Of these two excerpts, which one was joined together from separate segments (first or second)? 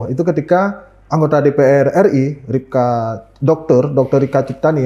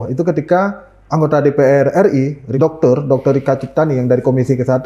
second